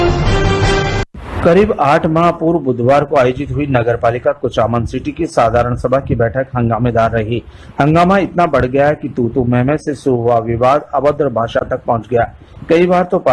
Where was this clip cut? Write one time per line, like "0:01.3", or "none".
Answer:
0:01.0